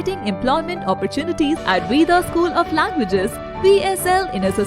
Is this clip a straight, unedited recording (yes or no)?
no